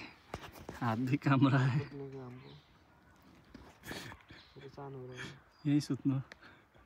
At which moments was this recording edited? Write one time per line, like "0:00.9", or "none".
none